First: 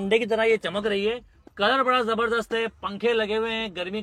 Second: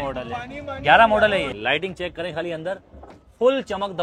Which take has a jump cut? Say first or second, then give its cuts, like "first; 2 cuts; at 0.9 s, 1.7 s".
second; 1 cut; at 1.5 s